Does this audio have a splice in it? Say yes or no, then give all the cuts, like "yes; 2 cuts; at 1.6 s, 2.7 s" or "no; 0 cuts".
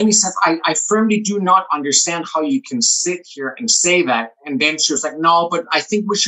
no; 0 cuts